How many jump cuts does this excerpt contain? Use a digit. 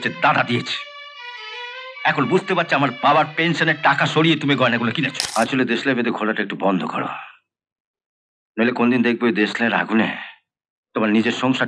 1